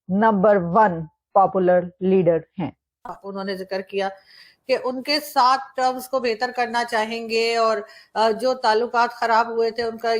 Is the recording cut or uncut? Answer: cut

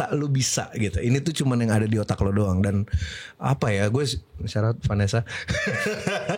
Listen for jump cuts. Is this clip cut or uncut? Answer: uncut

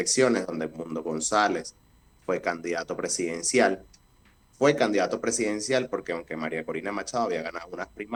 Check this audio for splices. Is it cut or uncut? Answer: uncut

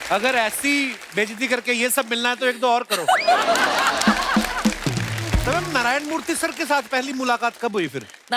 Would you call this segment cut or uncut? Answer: cut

